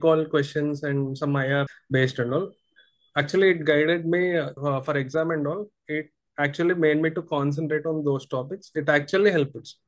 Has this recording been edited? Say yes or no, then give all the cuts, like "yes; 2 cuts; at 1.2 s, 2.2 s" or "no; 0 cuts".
yes; 2 cuts; at 1.7 s, 4.5 s